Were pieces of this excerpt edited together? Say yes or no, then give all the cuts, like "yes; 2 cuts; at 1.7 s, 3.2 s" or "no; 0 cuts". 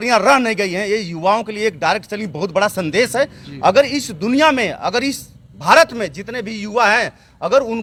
no; 0 cuts